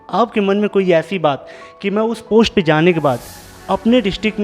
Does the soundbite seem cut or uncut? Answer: uncut